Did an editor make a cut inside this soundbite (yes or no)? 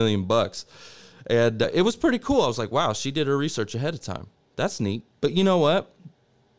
no